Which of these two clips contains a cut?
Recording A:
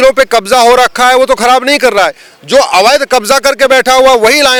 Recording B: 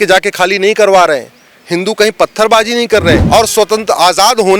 B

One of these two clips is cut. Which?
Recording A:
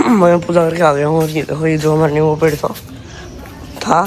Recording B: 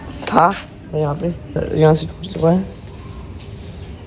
B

